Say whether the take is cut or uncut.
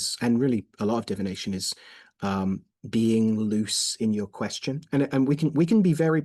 uncut